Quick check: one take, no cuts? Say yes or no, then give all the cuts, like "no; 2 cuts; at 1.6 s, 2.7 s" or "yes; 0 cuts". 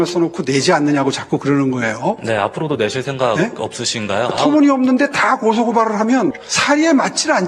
no; 1 cut; at 6.5 s